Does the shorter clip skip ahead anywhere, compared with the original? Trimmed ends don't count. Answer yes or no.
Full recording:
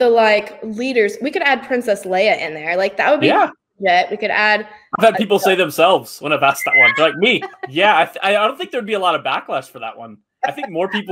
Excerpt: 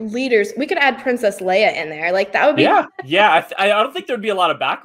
yes